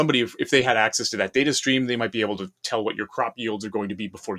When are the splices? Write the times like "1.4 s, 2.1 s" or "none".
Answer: none